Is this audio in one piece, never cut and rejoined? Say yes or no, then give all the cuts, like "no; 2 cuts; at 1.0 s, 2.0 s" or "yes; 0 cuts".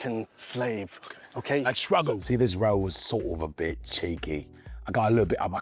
no; 1 cut; at 2.2 s